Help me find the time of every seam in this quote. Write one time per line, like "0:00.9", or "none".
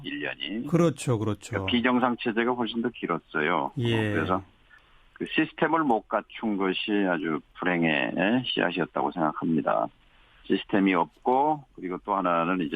0:10.3